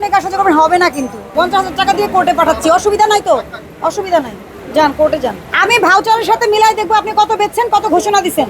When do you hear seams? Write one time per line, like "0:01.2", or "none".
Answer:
0:01.3
0:05.5